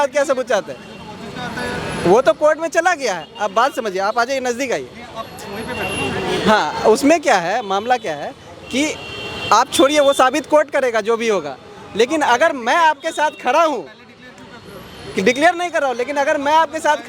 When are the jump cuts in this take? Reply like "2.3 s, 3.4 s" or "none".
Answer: none